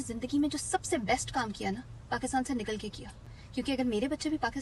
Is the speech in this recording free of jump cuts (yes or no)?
yes